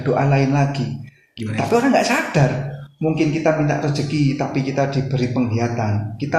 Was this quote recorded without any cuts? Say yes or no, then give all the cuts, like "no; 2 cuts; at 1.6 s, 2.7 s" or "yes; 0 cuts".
yes; 0 cuts